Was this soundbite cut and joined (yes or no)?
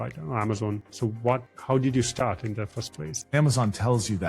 yes